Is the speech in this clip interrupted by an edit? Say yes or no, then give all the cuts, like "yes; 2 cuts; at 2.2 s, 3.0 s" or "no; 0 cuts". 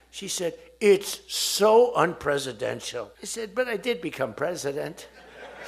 yes; 1 cut; at 3.2 s